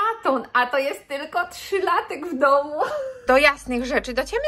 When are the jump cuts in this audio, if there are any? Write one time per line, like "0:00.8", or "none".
0:03.2